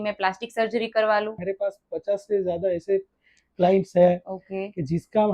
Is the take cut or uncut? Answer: cut